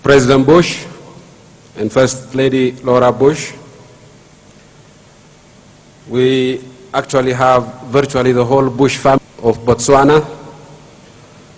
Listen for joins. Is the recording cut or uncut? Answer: uncut